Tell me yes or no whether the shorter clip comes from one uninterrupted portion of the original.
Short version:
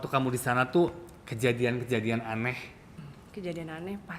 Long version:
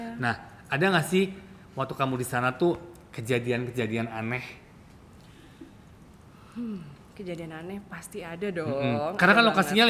no